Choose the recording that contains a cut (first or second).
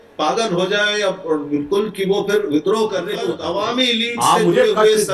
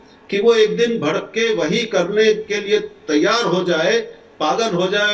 first